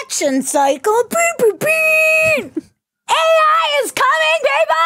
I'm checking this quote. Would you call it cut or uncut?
uncut